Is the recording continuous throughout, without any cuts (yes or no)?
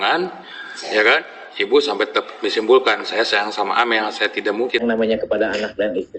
no